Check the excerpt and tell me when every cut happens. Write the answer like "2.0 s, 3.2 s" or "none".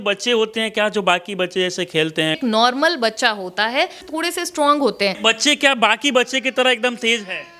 2.4 s, 4.0 s, 5.2 s